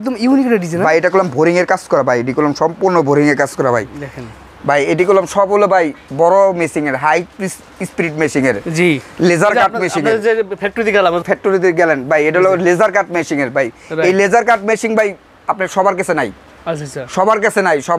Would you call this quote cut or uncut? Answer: uncut